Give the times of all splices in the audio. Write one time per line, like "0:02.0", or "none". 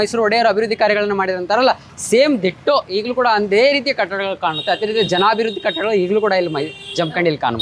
none